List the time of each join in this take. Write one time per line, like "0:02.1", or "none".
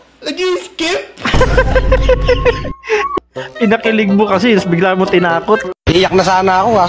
0:03.1